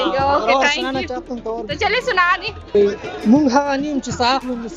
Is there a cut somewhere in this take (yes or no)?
yes